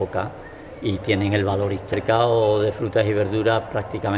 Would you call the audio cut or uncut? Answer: uncut